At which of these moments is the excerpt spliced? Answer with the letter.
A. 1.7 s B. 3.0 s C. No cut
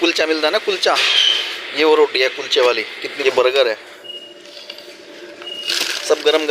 B